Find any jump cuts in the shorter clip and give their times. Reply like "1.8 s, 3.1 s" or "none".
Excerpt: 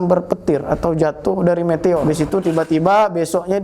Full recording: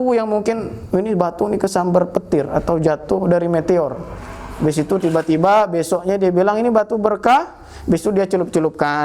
2.0 s